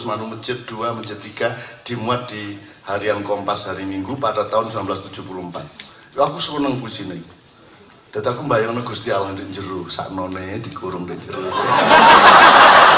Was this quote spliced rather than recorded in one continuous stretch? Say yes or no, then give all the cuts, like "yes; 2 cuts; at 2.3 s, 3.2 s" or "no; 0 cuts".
no; 0 cuts